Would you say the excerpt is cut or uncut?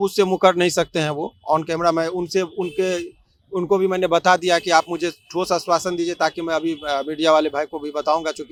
uncut